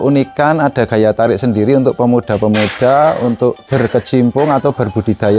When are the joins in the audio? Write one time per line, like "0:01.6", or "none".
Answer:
0:03.7

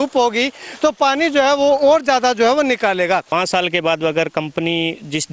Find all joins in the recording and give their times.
0:03.3

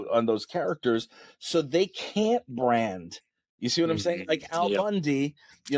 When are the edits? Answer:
none

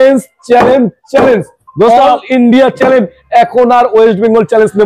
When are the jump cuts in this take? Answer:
none

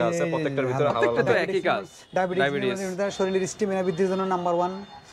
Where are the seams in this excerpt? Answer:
0:01.1

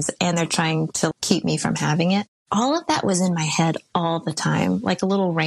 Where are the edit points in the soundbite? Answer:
none

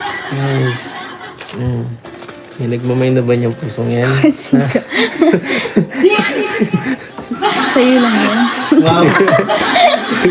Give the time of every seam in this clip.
none

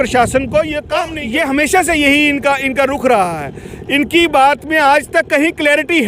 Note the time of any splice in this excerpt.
0:01.1

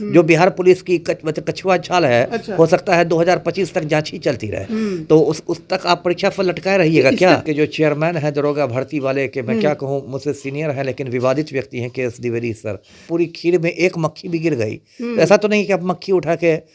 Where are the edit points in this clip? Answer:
0:07.4
0:13.1

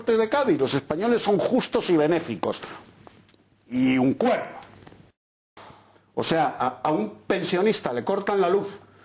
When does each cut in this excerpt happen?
0:05.3

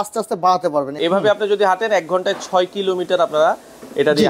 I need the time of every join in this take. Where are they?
0:01.0

